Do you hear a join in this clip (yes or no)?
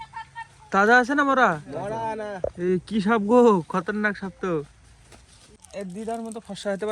yes